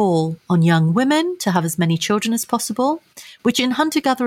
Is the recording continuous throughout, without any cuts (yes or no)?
yes